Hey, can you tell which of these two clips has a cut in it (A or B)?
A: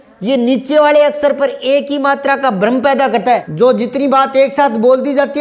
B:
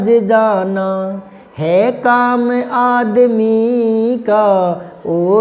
A